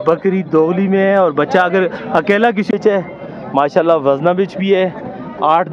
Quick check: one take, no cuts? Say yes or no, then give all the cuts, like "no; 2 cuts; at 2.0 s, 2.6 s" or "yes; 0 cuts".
no; 1 cut; at 2.8 s